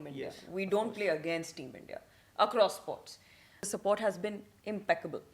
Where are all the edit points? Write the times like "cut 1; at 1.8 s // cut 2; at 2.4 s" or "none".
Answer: cut 1; at 3.6 s